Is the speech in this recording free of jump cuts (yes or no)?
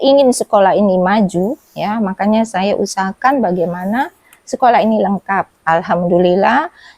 yes